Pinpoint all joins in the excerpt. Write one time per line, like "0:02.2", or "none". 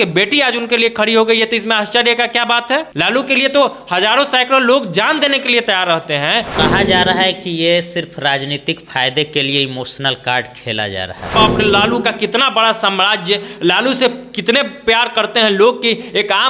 0:02.9
0:06.5
0:11.3